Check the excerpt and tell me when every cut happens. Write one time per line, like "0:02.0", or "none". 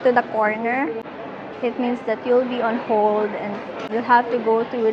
0:01.0
0:03.9